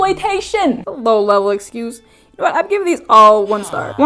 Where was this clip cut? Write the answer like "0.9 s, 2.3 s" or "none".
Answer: 0.9 s

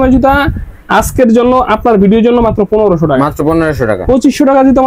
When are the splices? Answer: none

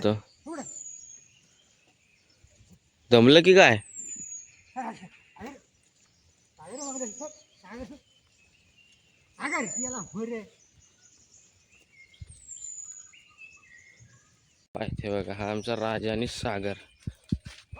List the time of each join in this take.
14.7 s

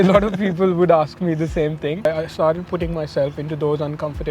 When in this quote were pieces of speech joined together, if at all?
2.0 s

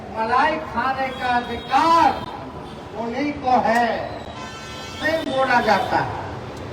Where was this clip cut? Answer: 5.0 s

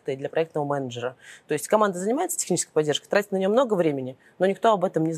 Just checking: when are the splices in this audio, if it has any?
none

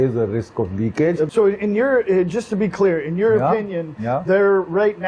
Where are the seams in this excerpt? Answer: 1.3 s

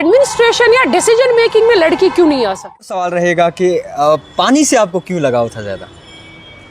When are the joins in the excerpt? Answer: 2.9 s

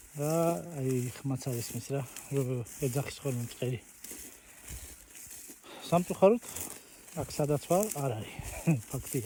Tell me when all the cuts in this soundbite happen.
none

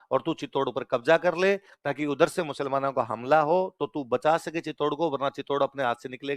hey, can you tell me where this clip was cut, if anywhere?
none

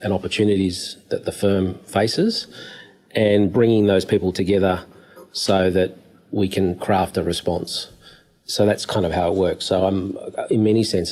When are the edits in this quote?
none

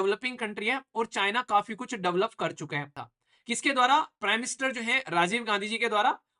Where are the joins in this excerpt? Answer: 3.0 s

